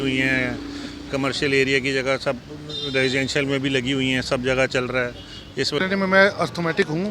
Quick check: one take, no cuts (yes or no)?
no